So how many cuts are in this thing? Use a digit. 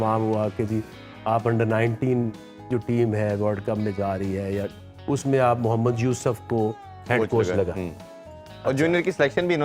0